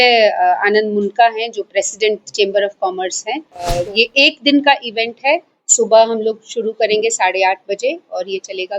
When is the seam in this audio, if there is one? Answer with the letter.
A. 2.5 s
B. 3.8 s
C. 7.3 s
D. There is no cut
B